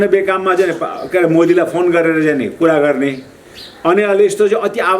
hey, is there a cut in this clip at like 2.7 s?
no; 0 cuts

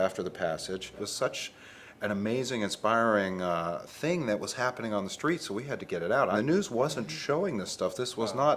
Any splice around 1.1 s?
yes; 2 cuts; at 1.1 s, 6.3 s

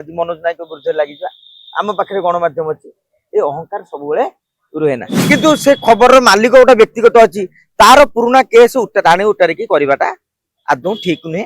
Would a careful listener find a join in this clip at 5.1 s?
yes; 1 cut; at 5.1 s

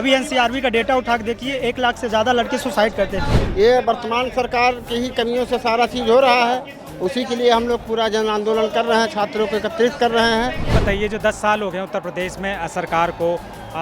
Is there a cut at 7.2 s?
no; 2 cuts; at 3.3 s, 10.8 s

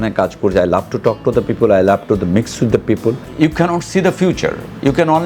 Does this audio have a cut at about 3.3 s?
yes; 1 cut; at 3.3 s

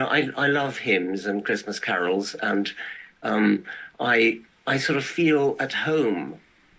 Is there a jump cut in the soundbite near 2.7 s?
no; 0 cuts

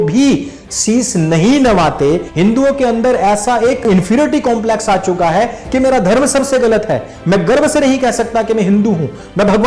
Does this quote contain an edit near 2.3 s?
yes; 2 cuts; at 2.3 s, 3.9 s

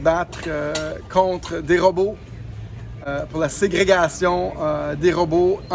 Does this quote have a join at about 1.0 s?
no; 1 cut; at 3.0 s

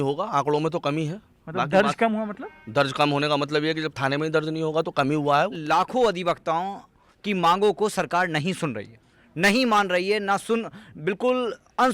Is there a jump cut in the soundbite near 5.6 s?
yes; 1 cut; at 5.6 s

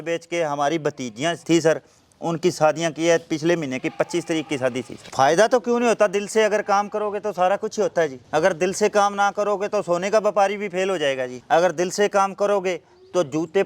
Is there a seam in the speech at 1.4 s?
no; 1 cut; at 4.9 s

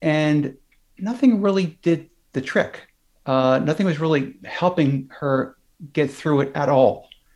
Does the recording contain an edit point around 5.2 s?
no; 0 cuts

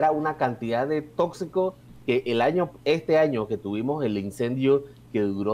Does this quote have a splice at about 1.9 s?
yes; 1 cut; at 1.9 s

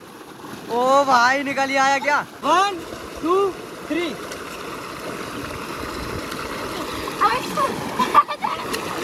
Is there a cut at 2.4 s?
yes; 1 cut; at 2.4 s

